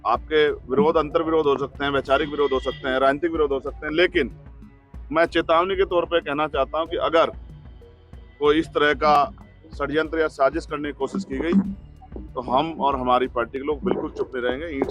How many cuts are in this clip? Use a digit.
0